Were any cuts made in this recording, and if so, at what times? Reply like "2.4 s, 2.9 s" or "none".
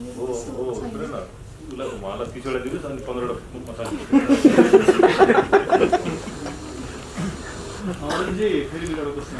none